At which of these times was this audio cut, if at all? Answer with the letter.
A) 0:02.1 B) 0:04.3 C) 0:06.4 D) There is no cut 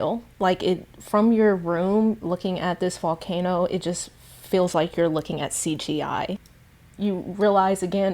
C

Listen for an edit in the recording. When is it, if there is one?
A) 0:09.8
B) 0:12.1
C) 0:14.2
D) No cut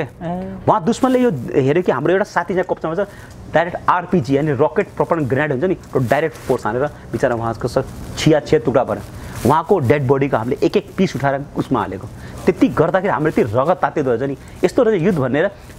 D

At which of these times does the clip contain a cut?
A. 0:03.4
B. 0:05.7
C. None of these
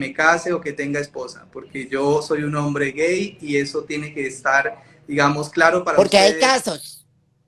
C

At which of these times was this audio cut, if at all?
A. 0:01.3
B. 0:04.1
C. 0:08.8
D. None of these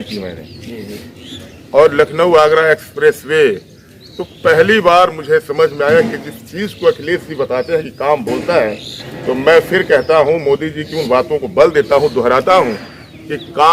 D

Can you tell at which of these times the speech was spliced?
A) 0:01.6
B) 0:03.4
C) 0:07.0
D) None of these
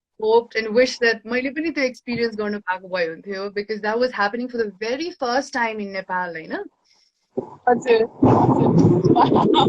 D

